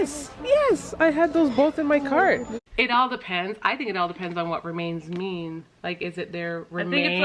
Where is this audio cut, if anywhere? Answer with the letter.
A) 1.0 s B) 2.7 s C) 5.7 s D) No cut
B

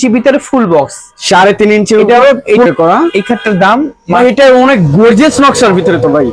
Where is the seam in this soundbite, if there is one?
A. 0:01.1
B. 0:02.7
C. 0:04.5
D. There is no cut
B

